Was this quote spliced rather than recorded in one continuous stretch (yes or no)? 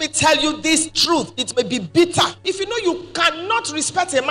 yes